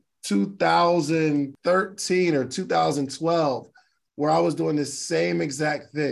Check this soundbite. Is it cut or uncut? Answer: cut